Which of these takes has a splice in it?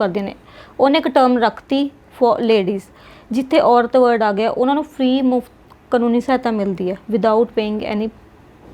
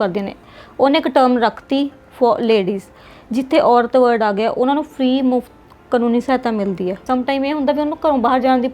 second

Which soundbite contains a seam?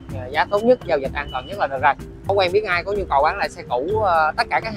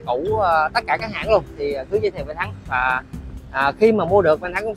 first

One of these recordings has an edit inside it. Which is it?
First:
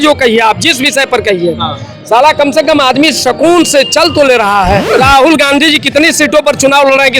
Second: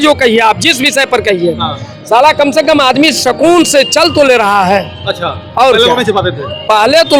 first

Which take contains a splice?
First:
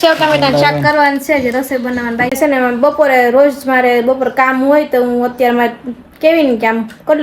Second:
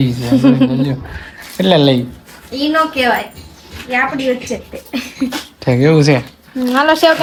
first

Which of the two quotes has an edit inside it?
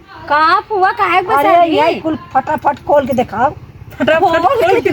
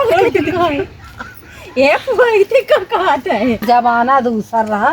second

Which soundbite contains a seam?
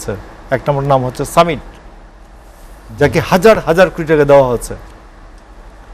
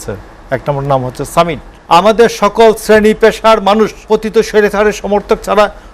second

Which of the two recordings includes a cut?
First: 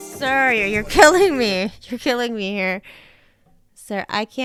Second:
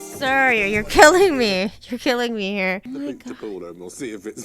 second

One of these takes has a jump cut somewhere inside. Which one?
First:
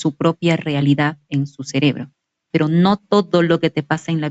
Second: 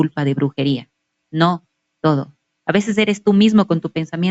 first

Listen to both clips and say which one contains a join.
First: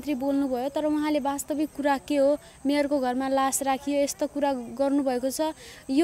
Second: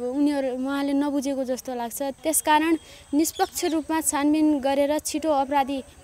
second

